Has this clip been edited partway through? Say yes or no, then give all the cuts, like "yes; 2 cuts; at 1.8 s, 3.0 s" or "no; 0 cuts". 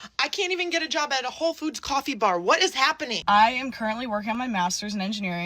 yes; 1 cut; at 3.1 s